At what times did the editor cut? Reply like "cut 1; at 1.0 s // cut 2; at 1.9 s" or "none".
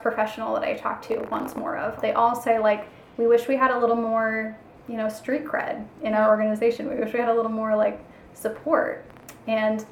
cut 1; at 2.0 s